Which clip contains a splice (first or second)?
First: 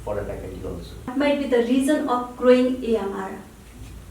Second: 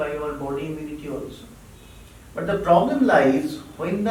first